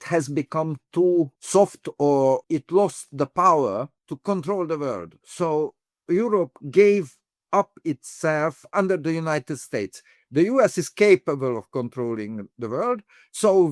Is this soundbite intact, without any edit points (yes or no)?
no